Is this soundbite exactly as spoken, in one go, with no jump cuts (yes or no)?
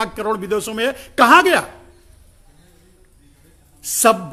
yes